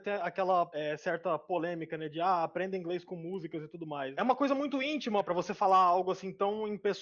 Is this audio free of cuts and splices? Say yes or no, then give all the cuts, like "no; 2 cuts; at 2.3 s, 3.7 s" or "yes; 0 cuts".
no; 1 cut; at 4.1 s